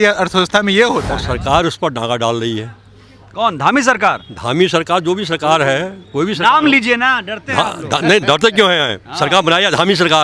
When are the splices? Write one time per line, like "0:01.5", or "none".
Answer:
0:01.1